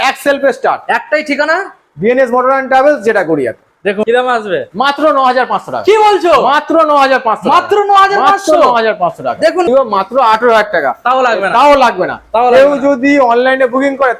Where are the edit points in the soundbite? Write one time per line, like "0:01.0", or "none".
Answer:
0:04.0
0:09.7